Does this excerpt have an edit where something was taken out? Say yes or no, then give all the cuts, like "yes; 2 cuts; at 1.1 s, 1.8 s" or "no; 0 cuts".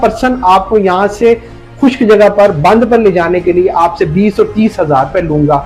no; 0 cuts